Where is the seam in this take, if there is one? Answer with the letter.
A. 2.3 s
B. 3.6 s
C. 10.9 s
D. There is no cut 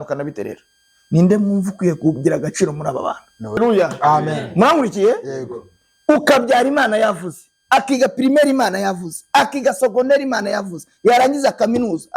B